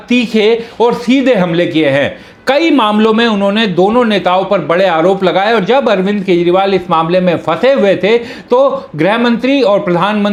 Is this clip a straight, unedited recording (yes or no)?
yes